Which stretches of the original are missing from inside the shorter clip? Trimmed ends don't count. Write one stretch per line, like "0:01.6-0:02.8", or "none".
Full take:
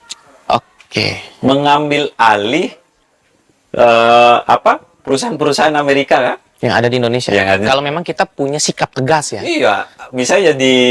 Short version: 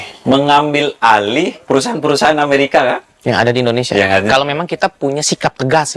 0:02.7-0:04.9